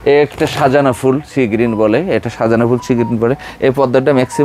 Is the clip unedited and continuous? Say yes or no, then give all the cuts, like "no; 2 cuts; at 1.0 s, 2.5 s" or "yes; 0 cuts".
yes; 0 cuts